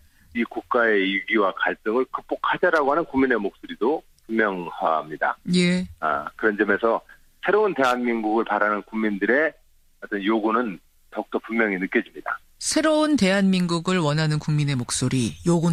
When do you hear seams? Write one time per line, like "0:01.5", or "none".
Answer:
none